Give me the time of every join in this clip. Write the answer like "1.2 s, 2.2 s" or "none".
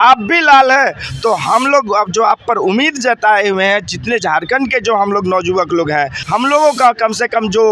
6.2 s